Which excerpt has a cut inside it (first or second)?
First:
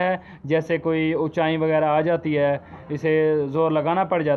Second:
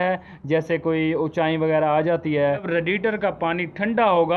second